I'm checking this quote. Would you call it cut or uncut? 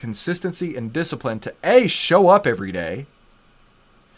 uncut